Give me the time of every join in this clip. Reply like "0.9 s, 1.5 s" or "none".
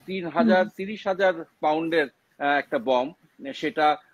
none